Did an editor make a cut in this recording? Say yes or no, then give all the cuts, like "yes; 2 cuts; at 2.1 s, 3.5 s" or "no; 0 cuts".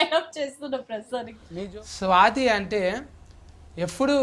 yes; 1 cut; at 1.4 s